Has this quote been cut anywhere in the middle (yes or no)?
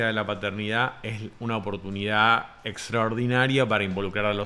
no